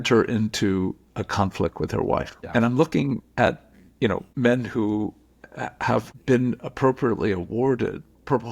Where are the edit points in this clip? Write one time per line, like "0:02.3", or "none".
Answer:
0:02.4
0:04.3
0:06.1